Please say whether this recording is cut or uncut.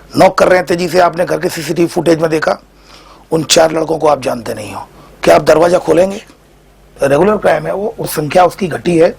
cut